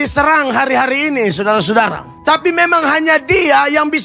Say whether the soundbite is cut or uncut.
cut